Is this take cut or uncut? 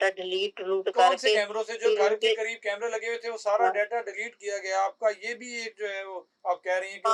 uncut